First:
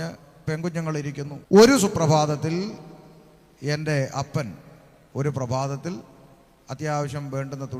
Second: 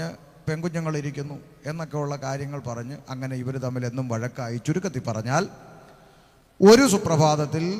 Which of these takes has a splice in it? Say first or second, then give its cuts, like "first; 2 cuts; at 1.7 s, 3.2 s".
first; 1 cut; at 0.9 s